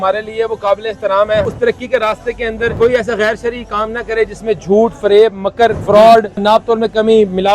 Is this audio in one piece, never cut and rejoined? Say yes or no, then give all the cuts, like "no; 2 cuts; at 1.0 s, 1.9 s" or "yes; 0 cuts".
no; 4 cuts; at 1.4 s, 2.7 s, 5.8 s, 6.4 s